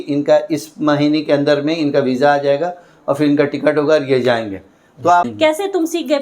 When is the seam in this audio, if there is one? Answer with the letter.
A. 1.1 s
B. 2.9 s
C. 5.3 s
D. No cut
C